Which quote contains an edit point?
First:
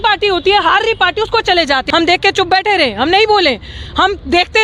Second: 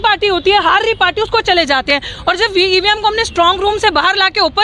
first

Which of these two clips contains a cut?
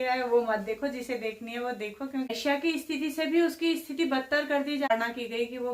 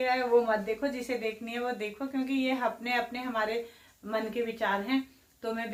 first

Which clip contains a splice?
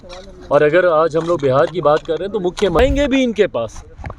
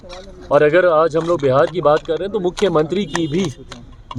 first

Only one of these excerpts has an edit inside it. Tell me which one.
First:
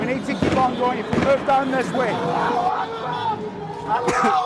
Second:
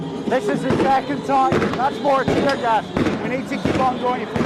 first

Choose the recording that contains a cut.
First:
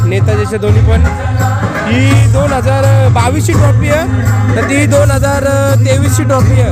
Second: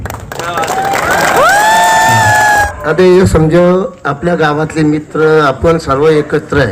second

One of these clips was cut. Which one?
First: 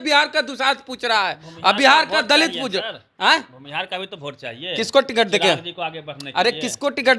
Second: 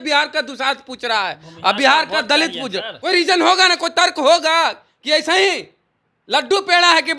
second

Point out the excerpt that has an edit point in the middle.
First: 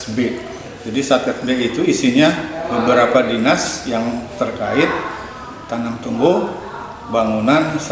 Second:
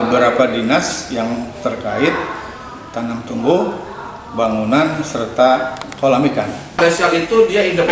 second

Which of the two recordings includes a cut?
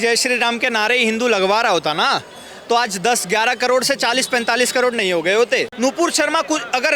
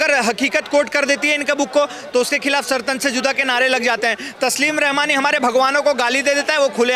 first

